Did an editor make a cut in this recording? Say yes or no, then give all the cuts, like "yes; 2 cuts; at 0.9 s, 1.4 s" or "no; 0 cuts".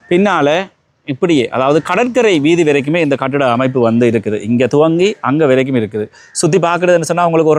no; 0 cuts